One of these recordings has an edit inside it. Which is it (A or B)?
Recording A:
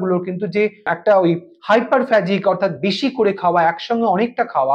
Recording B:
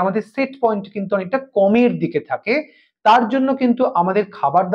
A